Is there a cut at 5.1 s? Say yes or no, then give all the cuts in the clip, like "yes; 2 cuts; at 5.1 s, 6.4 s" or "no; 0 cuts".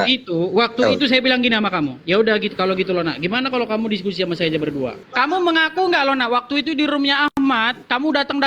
yes; 1 cut; at 5.1 s